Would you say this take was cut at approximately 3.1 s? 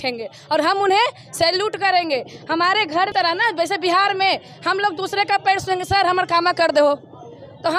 yes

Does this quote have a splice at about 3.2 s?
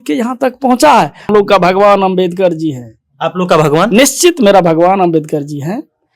no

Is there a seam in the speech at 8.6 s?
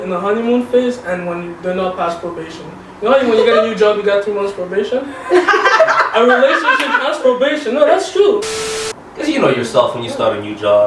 yes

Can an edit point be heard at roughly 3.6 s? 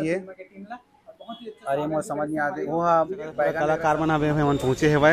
yes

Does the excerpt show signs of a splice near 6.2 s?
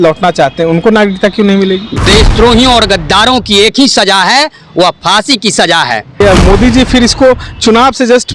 yes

